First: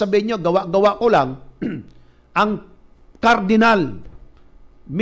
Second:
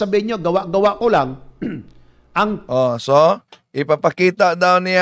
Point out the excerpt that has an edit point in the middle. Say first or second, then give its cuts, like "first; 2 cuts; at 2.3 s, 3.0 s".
first; 2 cuts; at 2.6 s, 4.1 s